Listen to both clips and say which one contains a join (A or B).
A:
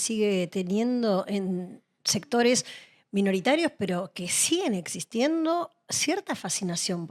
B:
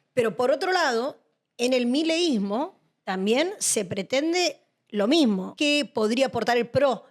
B